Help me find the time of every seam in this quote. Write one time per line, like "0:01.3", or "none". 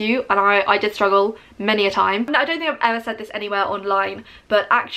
0:02.3